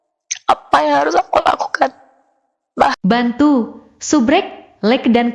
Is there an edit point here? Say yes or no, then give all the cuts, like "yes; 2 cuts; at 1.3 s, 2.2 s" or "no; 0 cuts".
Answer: yes; 1 cut; at 3.0 s